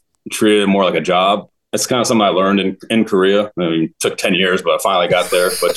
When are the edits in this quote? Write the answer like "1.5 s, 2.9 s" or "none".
1.6 s